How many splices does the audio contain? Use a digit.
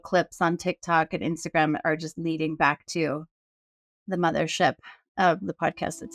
0